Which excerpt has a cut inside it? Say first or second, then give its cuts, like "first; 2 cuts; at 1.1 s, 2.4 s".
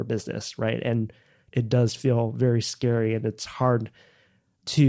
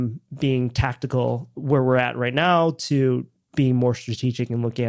first; 1 cut; at 1.5 s